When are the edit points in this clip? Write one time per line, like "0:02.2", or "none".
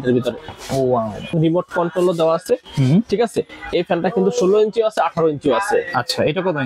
0:01.3